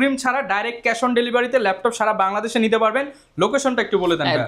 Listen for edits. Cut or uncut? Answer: uncut